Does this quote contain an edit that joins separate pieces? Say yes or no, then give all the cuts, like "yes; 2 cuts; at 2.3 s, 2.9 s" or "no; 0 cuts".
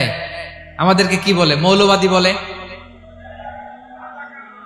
no; 0 cuts